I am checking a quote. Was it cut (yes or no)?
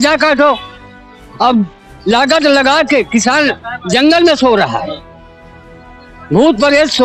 no